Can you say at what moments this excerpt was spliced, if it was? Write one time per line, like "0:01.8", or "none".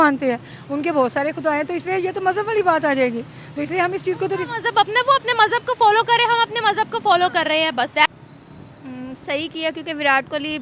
0:08.1